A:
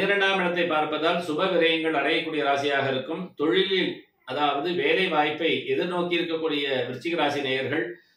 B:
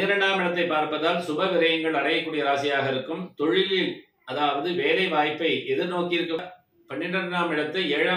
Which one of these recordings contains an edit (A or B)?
B